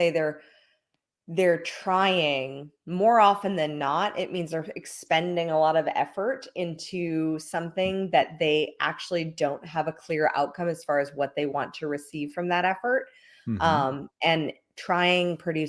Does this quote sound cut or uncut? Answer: uncut